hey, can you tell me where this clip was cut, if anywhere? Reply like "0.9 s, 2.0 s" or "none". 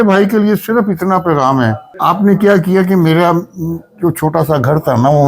1.9 s